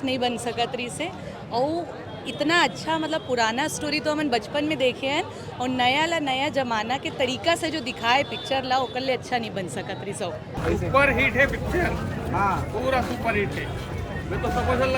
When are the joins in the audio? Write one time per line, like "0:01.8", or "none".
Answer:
0:10.6